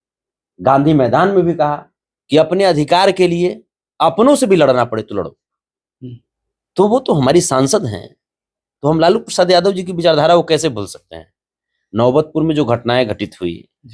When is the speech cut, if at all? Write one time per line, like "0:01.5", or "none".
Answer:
none